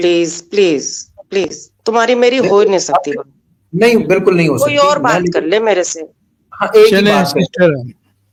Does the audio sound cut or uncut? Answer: uncut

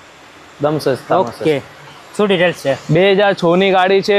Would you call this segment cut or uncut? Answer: uncut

